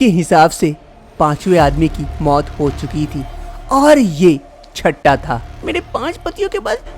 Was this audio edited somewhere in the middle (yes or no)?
yes